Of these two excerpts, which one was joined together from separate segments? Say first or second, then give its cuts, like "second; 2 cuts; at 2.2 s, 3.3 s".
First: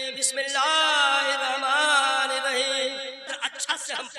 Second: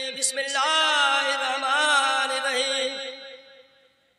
first; 1 cut; at 3.2 s